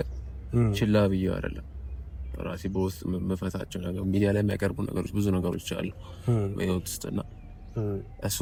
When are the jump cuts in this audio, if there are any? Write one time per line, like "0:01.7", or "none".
none